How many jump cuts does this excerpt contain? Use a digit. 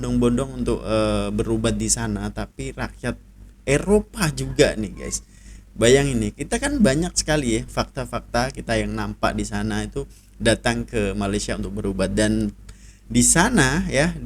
0